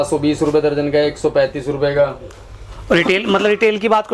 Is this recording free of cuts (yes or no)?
yes